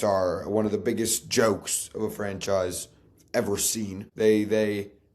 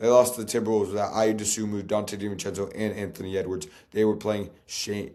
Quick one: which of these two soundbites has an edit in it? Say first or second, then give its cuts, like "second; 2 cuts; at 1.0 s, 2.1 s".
first; 1 cut; at 4.0 s